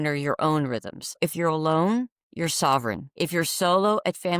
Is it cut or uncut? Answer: cut